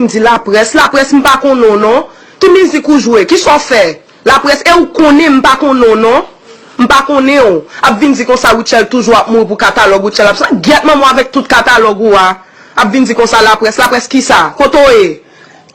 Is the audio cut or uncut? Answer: uncut